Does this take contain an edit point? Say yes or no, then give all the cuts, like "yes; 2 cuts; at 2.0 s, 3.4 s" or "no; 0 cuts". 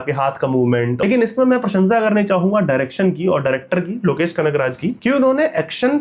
yes; 2 cuts; at 1.0 s, 5.0 s